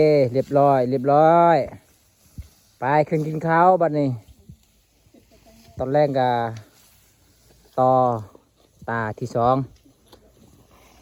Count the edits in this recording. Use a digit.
0